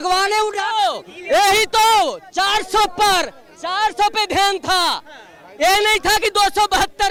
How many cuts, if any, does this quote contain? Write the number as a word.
zero